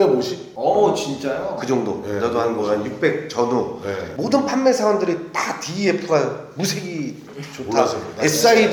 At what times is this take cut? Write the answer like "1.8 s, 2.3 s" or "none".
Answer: none